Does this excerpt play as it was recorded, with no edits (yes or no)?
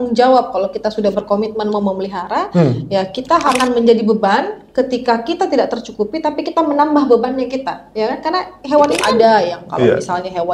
no